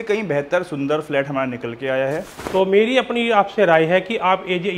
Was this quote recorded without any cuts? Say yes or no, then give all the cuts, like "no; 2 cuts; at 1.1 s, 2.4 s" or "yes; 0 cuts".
no; 1 cut; at 2.3 s